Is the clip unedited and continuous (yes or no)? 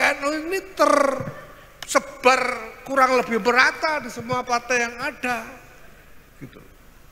yes